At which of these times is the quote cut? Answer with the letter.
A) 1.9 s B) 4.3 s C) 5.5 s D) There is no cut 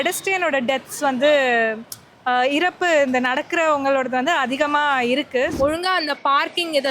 C